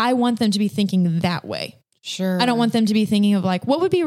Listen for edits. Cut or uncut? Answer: uncut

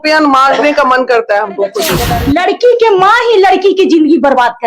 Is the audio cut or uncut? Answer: cut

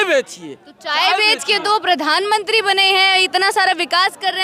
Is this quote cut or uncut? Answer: uncut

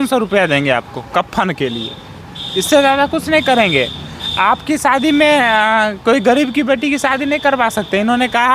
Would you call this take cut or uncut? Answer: uncut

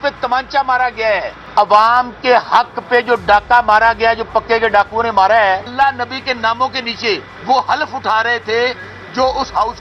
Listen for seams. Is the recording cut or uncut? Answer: cut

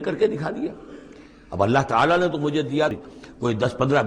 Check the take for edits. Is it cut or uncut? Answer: cut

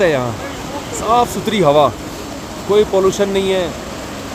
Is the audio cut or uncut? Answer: uncut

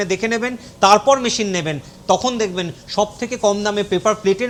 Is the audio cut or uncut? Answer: uncut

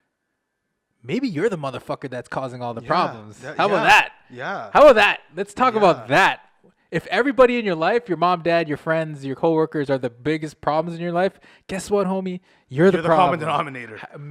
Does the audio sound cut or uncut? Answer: uncut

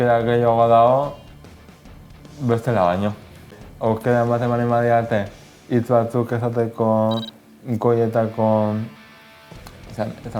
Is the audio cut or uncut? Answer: cut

